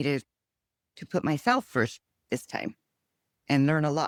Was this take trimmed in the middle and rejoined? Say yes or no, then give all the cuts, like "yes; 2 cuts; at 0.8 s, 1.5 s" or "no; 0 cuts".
no; 0 cuts